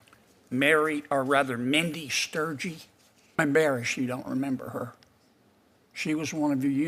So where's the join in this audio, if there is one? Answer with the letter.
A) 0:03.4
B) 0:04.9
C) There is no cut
A